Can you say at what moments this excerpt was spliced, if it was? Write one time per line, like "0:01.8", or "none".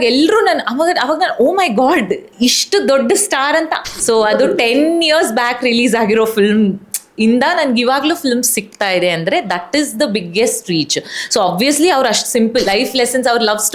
0:03.8
0:12.7